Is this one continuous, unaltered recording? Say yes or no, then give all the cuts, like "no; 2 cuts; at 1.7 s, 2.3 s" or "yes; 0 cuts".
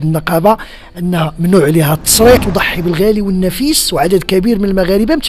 no; 1 cut; at 2.5 s